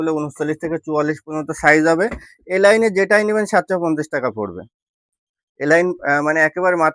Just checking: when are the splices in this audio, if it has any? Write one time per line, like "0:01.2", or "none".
none